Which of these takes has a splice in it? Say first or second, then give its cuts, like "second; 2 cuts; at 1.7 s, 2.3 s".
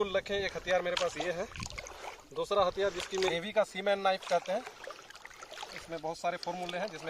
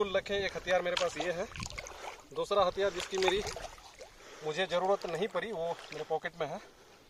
first; 1 cut; at 3.3 s